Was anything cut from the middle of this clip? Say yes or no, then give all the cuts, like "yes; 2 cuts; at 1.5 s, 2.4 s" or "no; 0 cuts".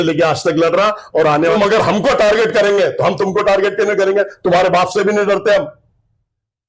yes; 1 cut; at 1.5 s